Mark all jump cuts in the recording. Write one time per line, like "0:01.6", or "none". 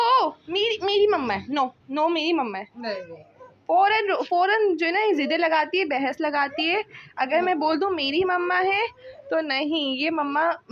none